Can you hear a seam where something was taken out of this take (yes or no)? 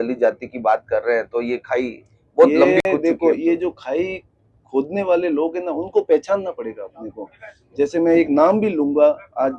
no